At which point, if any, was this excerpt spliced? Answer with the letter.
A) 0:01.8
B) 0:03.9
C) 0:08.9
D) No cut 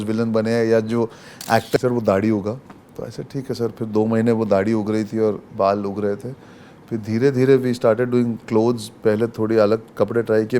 A